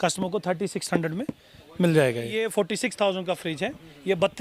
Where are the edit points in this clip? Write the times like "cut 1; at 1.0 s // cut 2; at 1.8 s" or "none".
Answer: cut 1; at 2.5 s

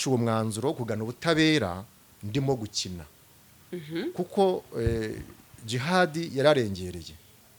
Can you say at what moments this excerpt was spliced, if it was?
none

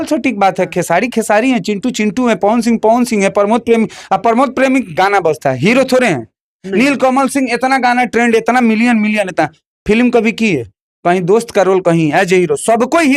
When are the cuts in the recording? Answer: none

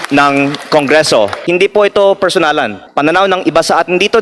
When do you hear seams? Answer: cut 1; at 1.4 s // cut 2; at 2.8 s

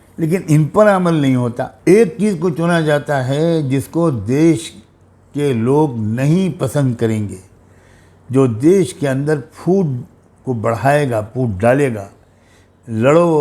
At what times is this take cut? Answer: cut 1; at 1.7 s

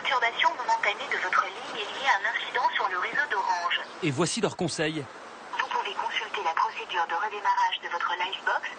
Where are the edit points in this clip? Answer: none

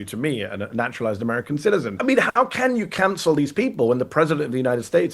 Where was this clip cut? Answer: cut 1; at 1.9 s

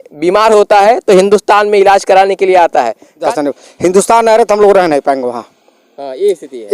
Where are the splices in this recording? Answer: cut 1; at 3.3 s

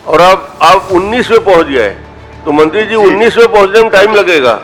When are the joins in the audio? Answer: none

